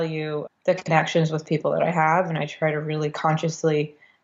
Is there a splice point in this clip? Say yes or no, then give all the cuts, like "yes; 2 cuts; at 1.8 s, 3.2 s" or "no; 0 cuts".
no; 0 cuts